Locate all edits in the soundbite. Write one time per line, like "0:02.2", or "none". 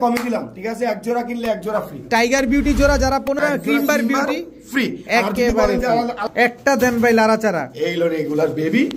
0:03.4
0:06.2